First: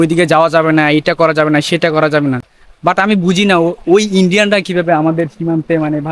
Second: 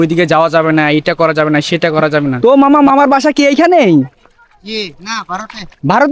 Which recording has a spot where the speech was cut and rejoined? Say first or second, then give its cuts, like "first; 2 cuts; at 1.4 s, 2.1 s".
second; 1 cut; at 2.4 s